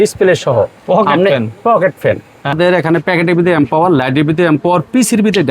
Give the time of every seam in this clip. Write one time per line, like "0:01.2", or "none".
0:02.5